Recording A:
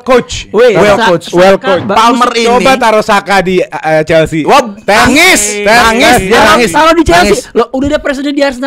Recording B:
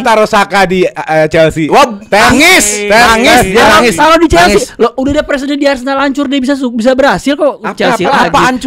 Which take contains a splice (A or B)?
A